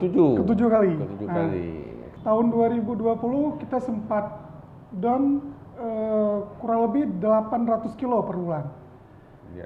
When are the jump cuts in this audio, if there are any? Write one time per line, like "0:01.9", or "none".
0:02.1